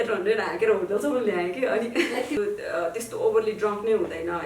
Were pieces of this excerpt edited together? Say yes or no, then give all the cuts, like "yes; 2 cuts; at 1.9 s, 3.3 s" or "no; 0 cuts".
yes; 1 cut; at 2.4 s